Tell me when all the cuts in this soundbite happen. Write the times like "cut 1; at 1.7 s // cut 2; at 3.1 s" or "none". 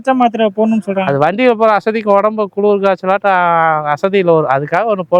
none

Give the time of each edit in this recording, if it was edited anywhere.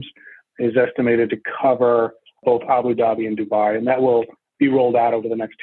none

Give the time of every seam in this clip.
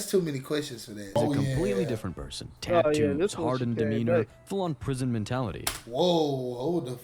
cut 1; at 1.1 s

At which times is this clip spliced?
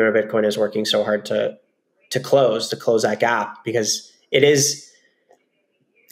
none

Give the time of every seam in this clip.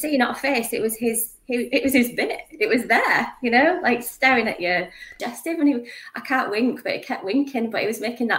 cut 1; at 5.2 s

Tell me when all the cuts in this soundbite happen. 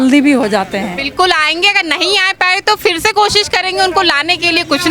cut 1; at 1.0 s

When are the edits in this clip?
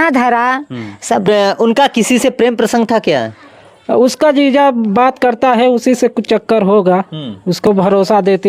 cut 1; at 1.3 s // cut 2; at 7.7 s

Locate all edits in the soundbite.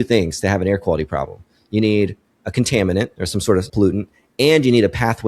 cut 1; at 3.7 s

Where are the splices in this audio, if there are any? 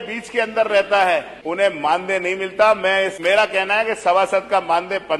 cut 1; at 1.4 s // cut 2; at 3.2 s

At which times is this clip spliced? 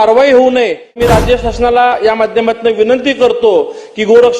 cut 1; at 1.0 s

